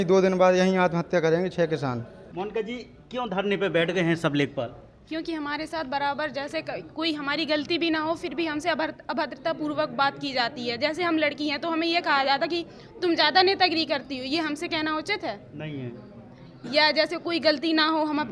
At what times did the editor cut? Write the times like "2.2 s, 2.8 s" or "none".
2.2 s